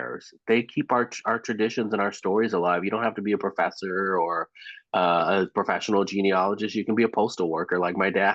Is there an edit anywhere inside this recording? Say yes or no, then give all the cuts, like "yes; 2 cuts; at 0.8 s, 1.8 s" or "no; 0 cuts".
no; 0 cuts